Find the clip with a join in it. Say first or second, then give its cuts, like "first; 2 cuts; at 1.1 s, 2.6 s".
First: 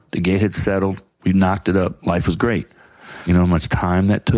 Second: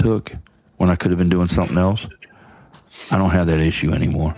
first; 1 cut; at 3.2 s